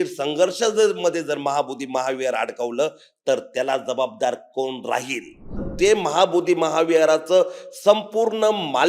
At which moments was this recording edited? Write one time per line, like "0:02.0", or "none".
0:05.6